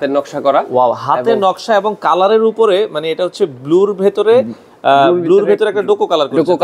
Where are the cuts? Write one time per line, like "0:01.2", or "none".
none